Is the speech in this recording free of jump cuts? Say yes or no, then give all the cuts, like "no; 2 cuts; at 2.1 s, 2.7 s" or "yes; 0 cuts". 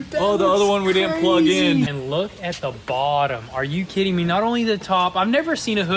no; 1 cut; at 1.9 s